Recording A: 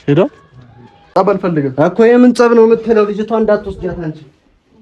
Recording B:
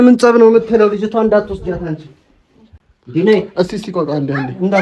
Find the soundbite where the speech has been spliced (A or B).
A